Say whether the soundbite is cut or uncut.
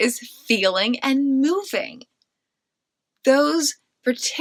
uncut